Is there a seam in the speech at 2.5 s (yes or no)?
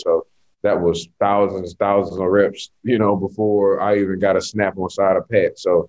no